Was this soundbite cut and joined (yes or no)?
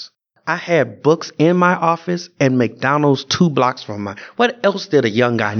no